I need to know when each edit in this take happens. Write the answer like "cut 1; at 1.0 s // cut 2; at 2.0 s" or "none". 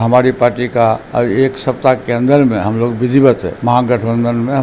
cut 1; at 1.1 s // cut 2; at 3.5 s